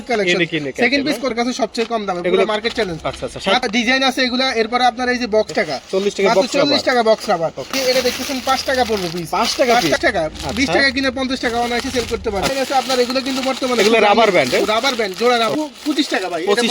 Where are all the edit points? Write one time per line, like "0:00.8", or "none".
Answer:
0:01.3
0:03.6
0:05.5
0:07.7
0:10.0
0:12.5
0:15.5